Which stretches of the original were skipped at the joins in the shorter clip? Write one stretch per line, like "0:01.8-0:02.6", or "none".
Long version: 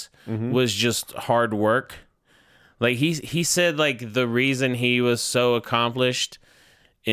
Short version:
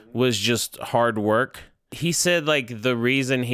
0:02.3-0:03.2